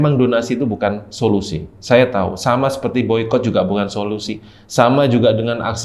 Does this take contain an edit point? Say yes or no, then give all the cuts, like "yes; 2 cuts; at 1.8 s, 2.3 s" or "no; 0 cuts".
no; 0 cuts